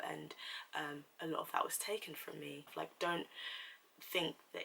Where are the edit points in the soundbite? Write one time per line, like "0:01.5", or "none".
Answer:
0:02.7